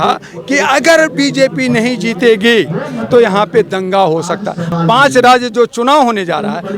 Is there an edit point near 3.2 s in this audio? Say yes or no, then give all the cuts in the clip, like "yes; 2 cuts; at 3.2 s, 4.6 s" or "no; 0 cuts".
no; 1 cut; at 4.6 s